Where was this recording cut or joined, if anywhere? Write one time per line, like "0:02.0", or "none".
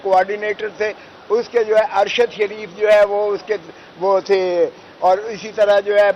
none